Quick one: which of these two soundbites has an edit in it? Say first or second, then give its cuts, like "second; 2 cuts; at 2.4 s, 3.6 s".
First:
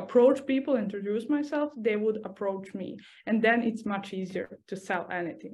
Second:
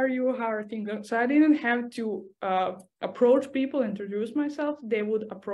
first; 1 cut; at 4.6 s